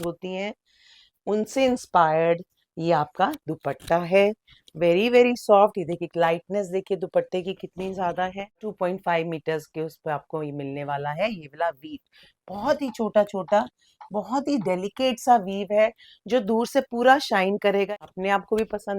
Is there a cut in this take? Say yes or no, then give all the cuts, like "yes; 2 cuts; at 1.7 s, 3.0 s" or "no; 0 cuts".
yes; 2 cuts; at 8.7 s, 17.9 s